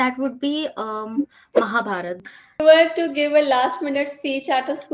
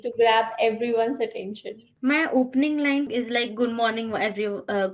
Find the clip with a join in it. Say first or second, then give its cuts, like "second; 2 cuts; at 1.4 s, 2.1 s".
first; 1 cut; at 2.6 s